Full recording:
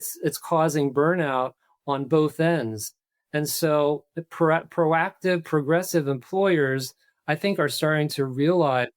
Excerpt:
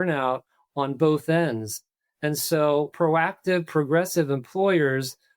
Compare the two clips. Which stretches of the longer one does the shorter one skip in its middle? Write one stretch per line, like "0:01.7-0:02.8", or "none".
0:04.0-0:04.7